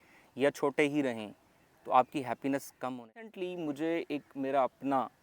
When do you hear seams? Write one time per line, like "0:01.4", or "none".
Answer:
0:03.3